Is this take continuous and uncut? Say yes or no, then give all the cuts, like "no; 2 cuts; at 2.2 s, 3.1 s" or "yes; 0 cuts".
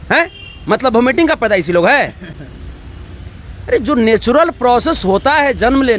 yes; 0 cuts